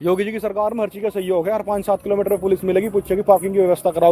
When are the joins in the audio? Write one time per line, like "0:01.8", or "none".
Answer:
none